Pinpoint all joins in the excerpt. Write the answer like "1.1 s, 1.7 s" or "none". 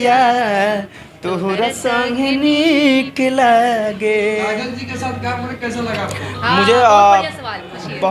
none